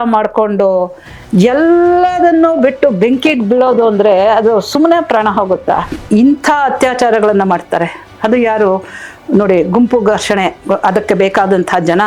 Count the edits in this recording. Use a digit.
1